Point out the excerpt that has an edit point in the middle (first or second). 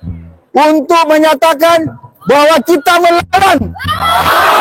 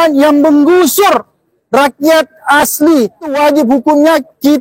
second